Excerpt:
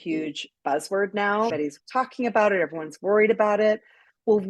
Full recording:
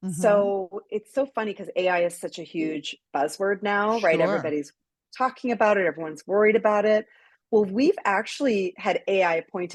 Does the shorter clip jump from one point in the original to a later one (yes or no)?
yes